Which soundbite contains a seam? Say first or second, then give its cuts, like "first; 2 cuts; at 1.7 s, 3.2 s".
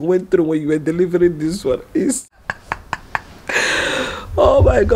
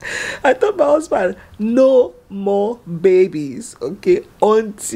first; 1 cut; at 2.1 s